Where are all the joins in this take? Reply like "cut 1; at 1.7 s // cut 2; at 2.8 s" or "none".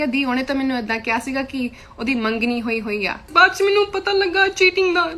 cut 1; at 3.3 s